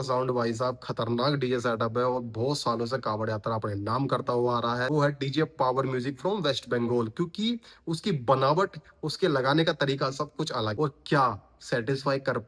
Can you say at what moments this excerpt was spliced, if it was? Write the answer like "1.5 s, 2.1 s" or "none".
4.9 s, 10.7 s